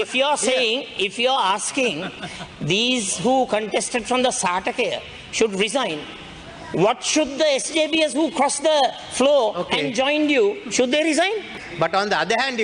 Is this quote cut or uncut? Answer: cut